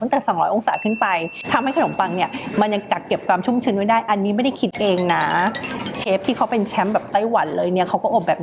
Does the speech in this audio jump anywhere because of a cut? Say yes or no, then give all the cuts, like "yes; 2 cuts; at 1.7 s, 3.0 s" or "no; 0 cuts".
yes; 1 cut; at 1.4 s